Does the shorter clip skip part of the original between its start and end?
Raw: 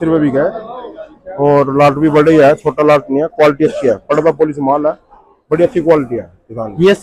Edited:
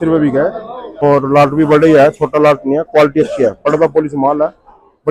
yes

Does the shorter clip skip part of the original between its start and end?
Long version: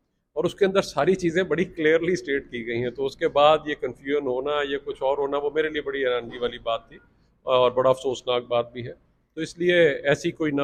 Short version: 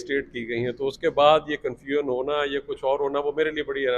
no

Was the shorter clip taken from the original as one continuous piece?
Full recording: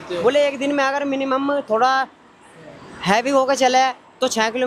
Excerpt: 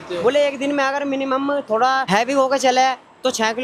no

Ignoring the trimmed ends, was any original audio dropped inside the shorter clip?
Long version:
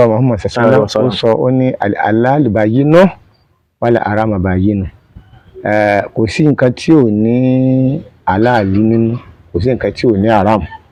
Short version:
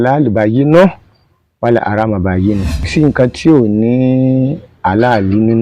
yes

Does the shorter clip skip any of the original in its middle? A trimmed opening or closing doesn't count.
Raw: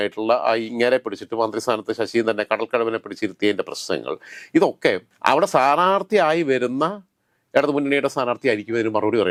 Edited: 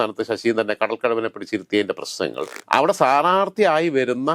yes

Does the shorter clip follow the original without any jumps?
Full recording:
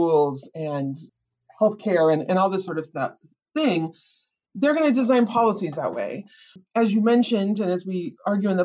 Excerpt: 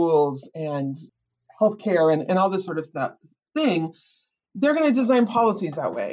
yes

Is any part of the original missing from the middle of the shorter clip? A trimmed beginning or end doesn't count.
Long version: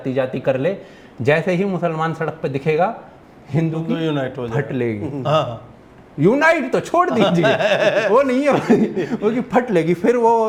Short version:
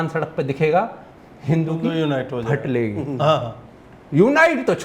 no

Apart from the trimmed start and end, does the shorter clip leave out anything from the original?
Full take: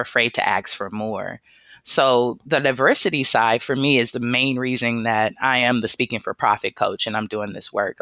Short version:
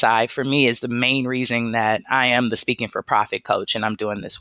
no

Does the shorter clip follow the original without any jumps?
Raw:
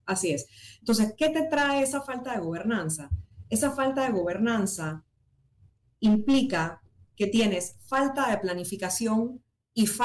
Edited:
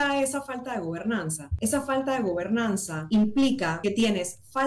no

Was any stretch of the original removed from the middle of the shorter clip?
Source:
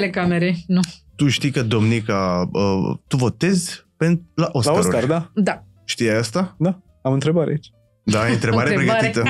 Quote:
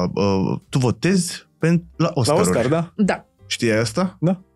no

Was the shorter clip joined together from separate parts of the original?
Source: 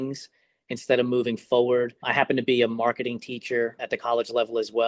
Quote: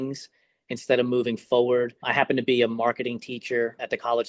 no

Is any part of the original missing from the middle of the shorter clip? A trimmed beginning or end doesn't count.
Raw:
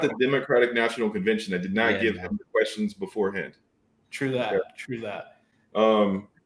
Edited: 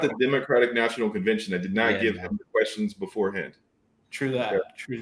no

